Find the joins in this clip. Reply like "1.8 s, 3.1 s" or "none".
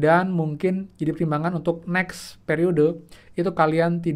none